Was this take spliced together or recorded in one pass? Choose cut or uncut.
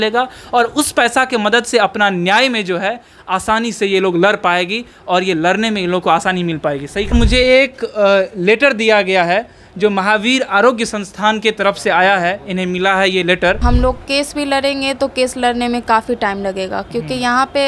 cut